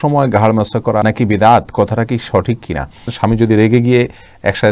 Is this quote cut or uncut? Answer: cut